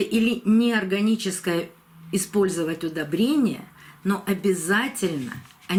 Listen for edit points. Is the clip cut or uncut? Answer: uncut